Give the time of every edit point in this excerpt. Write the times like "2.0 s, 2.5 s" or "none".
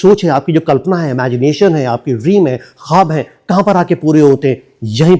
none